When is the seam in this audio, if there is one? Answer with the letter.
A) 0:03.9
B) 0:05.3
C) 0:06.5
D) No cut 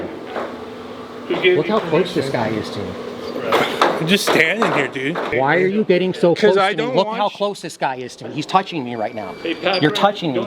B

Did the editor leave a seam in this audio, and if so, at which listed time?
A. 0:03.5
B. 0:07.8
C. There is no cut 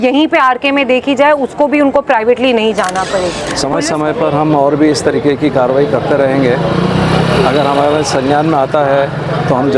A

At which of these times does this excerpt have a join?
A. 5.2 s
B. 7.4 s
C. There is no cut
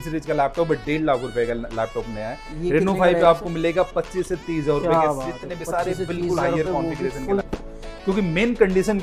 B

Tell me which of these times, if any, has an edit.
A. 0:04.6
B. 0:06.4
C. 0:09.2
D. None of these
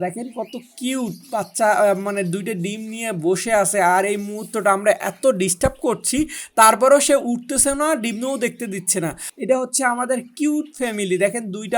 C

